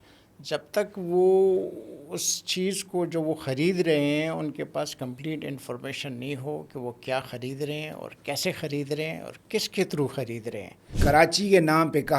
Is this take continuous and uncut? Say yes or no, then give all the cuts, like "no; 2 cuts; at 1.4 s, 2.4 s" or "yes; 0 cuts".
no; 1 cut; at 10.9 s